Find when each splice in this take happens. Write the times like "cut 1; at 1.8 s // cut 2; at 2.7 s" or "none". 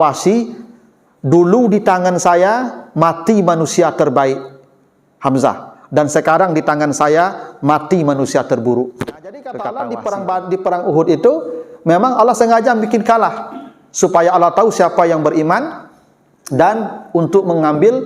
cut 1; at 9.5 s